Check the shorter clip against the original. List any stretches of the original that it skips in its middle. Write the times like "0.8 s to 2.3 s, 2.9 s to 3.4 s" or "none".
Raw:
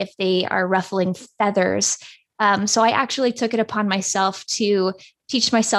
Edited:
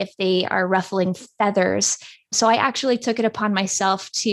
2.3 s to 2.7 s